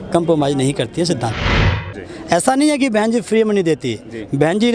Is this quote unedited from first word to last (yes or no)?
no